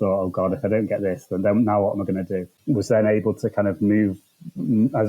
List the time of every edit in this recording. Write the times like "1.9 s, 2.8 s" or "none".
2.5 s

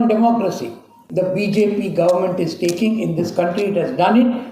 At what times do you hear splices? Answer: 1.0 s

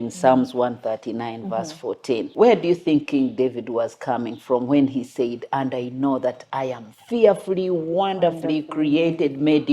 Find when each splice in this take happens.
2.3 s

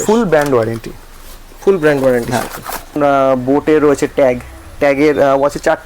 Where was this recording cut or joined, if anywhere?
3.0 s

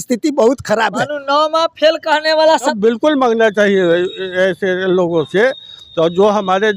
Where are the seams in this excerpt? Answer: 2.7 s

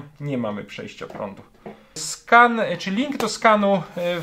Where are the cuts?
2.1 s

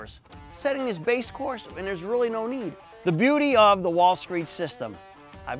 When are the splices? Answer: 2.8 s

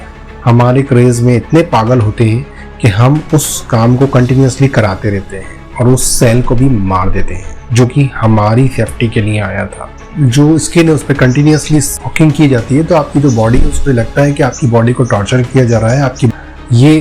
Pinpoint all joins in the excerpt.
10.0 s, 12.0 s, 16.3 s

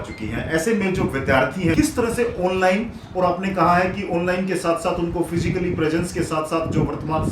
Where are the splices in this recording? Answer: 1.7 s

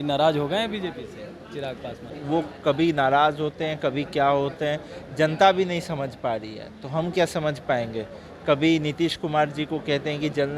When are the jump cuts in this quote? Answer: 2.0 s

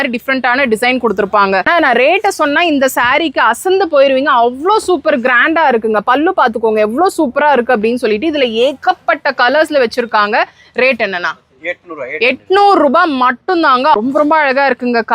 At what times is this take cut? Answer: 1.7 s, 14.0 s

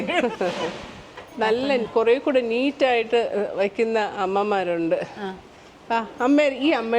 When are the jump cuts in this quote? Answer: 1.2 s

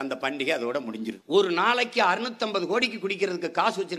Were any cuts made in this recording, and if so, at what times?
1.2 s

